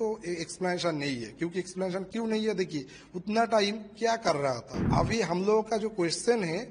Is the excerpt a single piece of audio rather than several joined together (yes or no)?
no